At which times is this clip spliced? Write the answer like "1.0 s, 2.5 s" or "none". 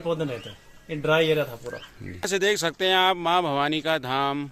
2.3 s